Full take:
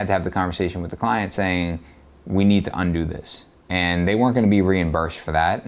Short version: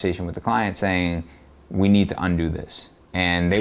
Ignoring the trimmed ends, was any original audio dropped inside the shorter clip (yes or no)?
no